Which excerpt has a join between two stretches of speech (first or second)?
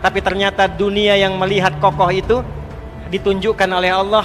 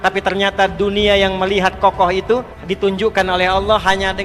second